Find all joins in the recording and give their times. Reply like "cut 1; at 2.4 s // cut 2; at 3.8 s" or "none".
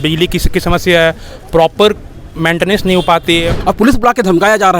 cut 1; at 3.5 s